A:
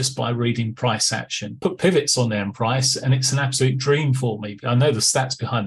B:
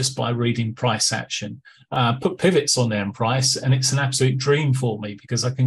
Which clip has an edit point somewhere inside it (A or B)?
A